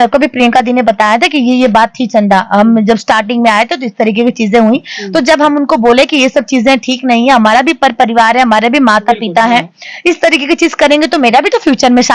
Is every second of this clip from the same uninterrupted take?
yes; 0 cuts

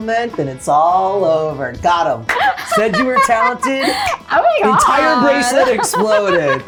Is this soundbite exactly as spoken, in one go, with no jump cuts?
yes; 0 cuts

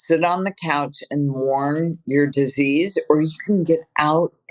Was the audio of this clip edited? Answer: no; 0 cuts

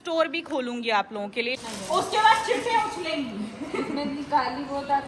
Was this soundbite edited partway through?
yes; 1 cut; at 1.5 s

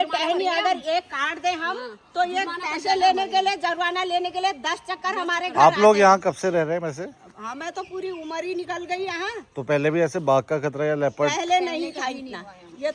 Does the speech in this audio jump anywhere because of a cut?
no; 0 cuts

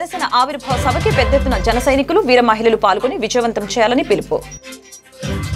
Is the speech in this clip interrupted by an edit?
no; 0 cuts

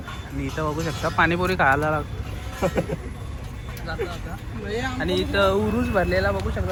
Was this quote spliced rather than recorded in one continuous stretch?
no; 0 cuts

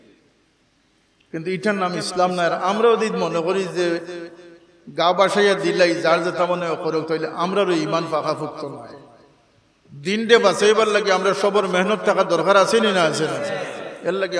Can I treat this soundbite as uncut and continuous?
yes; 0 cuts

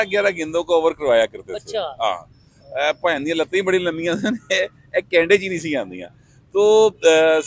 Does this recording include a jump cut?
no; 0 cuts

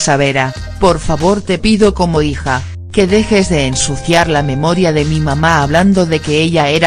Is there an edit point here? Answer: no; 0 cuts

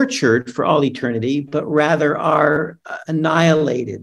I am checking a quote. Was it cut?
no; 0 cuts

